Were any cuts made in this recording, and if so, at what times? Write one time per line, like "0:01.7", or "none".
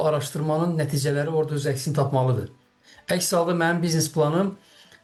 none